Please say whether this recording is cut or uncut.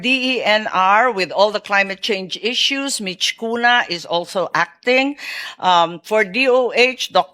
uncut